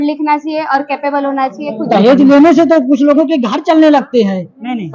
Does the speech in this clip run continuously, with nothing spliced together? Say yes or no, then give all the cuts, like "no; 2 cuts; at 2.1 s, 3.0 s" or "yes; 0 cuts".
no; 1 cut; at 1.8 s